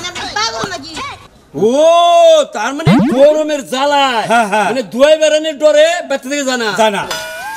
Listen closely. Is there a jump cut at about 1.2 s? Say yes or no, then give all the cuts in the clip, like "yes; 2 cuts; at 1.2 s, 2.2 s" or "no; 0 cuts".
yes; 1 cut; at 1.2 s